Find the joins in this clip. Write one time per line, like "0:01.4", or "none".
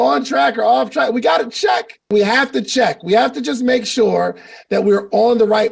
0:02.1